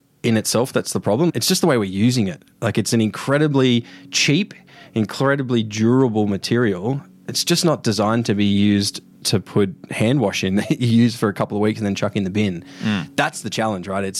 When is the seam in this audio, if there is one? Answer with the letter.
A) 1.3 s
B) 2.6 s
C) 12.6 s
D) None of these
A